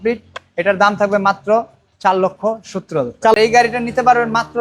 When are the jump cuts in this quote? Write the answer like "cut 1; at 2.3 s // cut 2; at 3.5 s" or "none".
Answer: cut 1; at 3.4 s

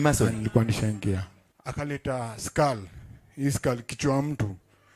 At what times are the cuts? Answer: cut 1; at 1.4 s

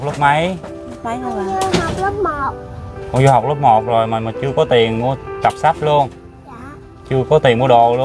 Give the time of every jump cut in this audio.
none

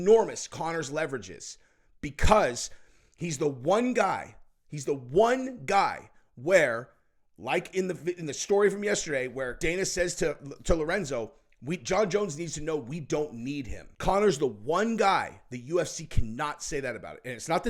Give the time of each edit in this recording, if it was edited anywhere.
cut 1; at 9.6 s // cut 2; at 13.8 s

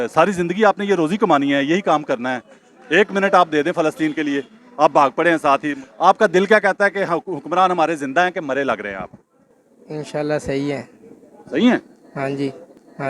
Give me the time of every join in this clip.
none

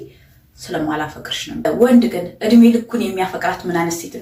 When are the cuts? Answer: cut 1; at 1.6 s

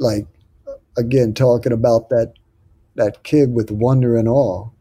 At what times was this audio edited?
none

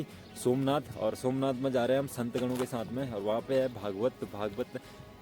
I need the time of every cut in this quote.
none

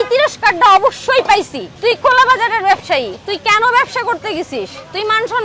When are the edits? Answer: none

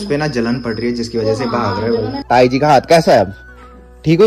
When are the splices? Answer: cut 1; at 2.2 s

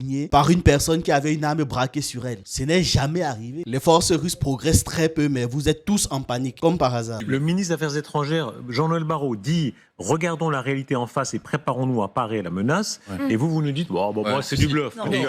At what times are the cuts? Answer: cut 1; at 3.6 s // cut 2; at 7.2 s

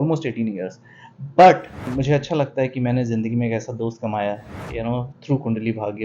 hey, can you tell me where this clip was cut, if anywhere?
cut 1; at 1.9 s

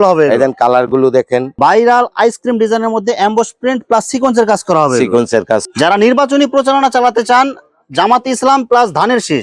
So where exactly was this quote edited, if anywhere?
cut 1; at 1.6 s // cut 2; at 5.7 s

